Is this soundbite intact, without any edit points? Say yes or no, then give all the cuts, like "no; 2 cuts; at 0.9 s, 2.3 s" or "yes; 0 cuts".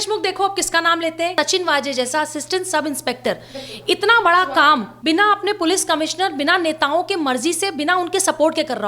no; 2 cuts; at 1.3 s, 4.9 s